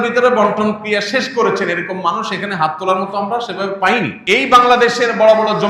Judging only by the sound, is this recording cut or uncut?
cut